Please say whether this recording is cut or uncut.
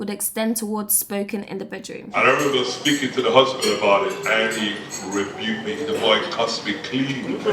cut